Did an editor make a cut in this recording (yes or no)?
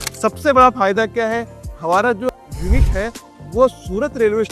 yes